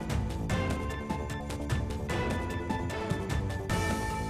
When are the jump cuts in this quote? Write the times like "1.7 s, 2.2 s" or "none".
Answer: none